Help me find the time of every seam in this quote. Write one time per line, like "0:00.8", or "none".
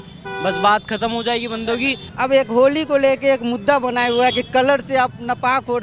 0:02.0